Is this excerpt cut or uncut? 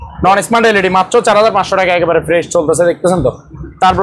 uncut